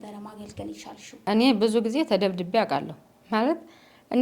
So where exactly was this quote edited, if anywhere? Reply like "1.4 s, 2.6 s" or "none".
1.2 s